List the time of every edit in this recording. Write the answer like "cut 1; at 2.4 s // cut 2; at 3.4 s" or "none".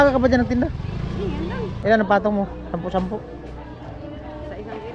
cut 1; at 1.7 s